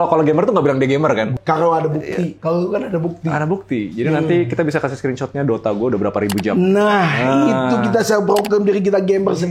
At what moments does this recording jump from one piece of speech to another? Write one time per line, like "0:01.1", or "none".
0:01.3